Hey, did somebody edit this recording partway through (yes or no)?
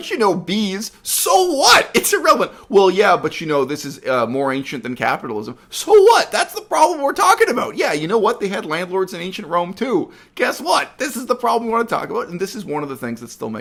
no